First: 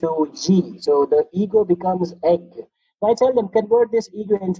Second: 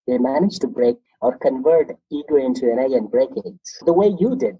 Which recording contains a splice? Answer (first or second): second